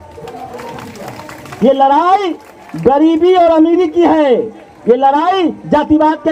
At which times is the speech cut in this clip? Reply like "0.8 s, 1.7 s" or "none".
none